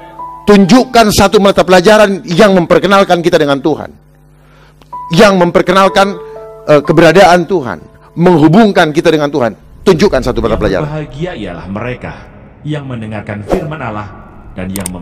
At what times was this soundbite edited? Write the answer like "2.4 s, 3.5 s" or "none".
10.8 s